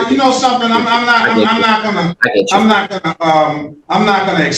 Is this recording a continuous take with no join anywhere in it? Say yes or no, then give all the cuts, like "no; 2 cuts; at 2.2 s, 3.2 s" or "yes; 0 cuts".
yes; 0 cuts